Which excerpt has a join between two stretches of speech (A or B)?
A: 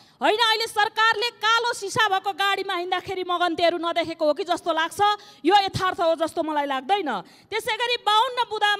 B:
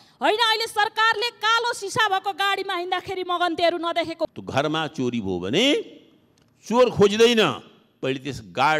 B